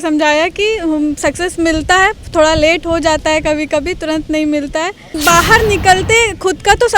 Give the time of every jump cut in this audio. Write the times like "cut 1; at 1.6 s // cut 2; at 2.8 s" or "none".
cut 1; at 5.1 s

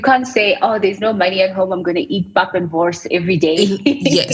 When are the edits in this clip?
none

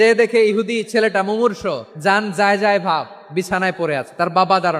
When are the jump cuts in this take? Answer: cut 1; at 1.9 s

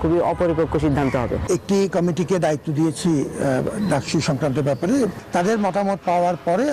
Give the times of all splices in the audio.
cut 1; at 1.4 s // cut 2; at 5.2 s

